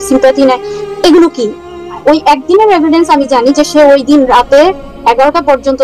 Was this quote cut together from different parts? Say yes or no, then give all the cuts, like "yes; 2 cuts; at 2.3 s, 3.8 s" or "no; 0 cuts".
yes; 1 cut; at 2.0 s